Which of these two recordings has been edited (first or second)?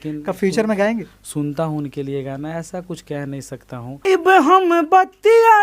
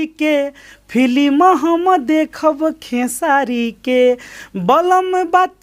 first